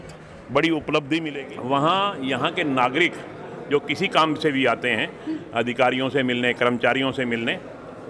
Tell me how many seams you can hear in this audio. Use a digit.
1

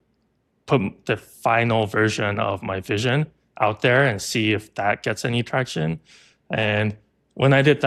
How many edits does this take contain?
0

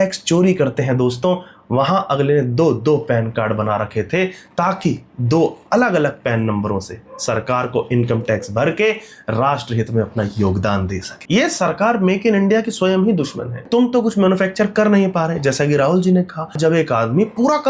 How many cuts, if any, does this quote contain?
3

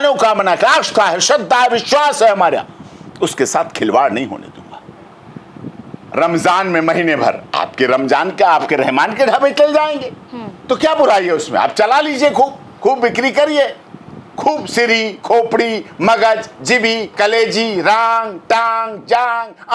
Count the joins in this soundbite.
1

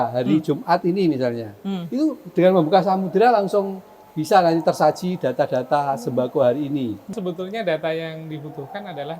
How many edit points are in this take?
1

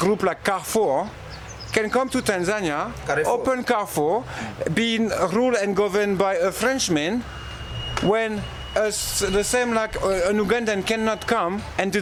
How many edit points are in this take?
0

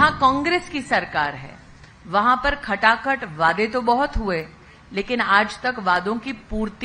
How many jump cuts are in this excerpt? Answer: 0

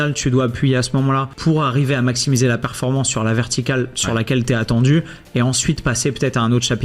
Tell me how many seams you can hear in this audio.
1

